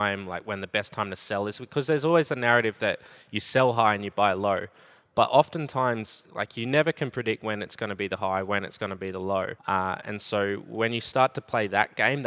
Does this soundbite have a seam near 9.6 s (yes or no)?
yes